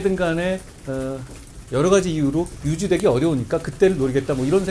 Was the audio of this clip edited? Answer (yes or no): no